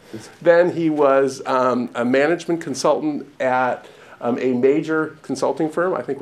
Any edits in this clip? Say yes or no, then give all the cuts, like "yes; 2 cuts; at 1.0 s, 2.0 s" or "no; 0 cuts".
no; 0 cuts